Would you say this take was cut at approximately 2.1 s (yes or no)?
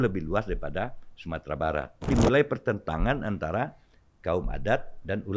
yes